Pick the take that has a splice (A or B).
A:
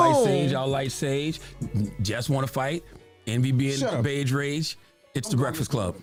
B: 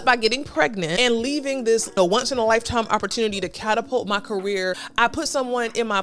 B